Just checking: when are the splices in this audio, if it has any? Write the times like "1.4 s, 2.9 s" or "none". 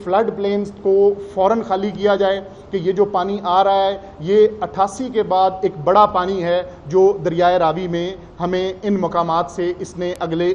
none